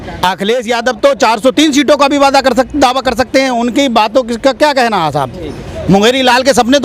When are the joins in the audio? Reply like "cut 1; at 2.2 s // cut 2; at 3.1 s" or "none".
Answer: none